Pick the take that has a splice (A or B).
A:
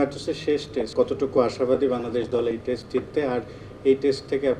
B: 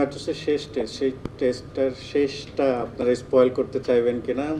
A